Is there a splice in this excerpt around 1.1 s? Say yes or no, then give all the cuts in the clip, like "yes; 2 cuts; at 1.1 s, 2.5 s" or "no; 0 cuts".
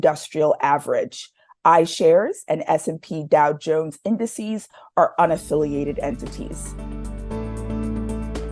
no; 1 cut; at 6.6 s